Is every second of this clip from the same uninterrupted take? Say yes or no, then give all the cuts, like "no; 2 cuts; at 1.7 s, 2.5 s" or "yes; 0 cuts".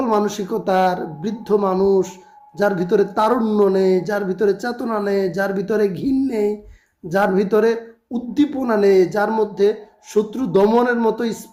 yes; 0 cuts